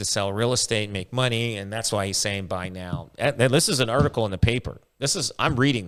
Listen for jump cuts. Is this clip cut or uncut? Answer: uncut